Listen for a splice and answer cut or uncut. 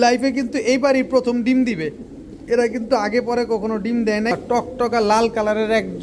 cut